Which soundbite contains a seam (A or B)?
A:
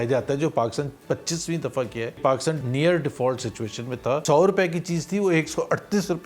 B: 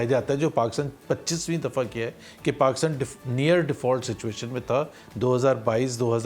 A